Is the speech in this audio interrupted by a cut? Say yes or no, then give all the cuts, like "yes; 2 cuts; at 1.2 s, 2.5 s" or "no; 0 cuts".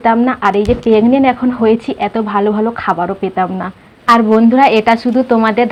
no; 0 cuts